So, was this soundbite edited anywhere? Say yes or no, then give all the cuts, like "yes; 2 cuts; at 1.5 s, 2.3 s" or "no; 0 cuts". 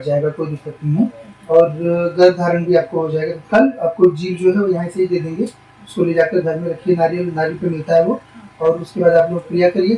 no; 0 cuts